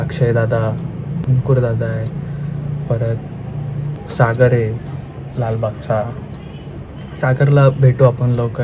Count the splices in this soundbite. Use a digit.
2